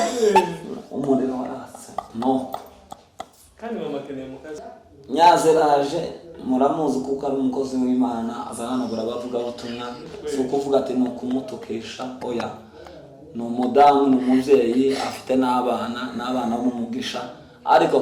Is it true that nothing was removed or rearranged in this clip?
no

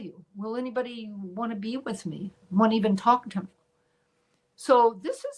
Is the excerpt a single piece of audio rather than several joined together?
no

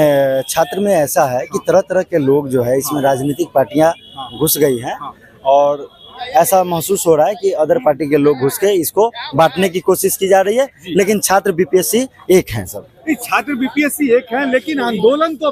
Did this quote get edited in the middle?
no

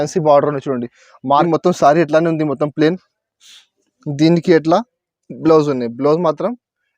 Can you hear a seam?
yes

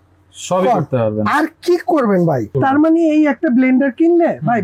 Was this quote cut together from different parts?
yes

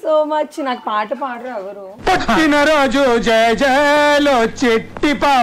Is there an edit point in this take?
no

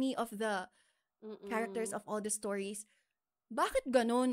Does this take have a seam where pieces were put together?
no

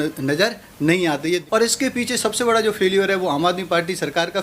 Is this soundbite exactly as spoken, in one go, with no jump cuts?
no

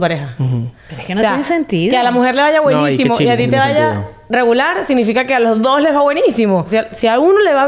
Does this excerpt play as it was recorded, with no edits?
no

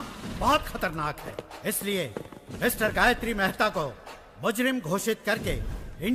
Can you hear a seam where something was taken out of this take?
no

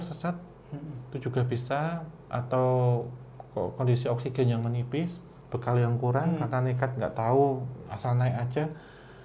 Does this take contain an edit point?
no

